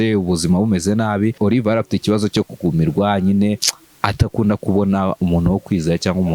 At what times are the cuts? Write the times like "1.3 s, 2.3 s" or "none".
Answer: 1.4 s